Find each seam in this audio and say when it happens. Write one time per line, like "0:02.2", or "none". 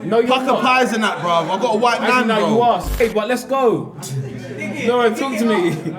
0:02.9